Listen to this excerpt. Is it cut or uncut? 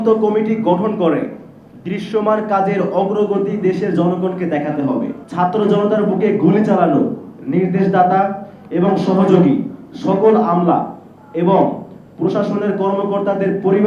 cut